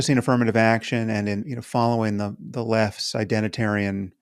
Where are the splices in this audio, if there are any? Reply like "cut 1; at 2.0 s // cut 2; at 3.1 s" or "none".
cut 1; at 1.5 s